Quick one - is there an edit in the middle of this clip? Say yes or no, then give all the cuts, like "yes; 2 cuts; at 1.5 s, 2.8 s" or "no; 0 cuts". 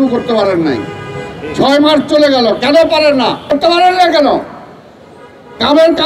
yes; 1 cut; at 3.5 s